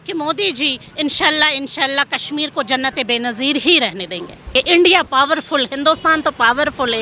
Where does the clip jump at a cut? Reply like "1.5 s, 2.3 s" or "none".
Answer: 4.5 s